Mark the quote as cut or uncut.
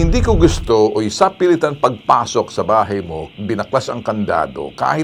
uncut